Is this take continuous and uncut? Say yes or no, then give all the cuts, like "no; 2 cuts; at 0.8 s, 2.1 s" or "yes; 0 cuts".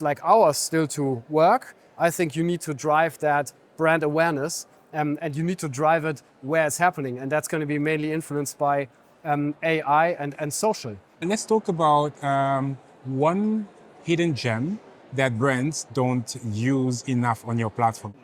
yes; 0 cuts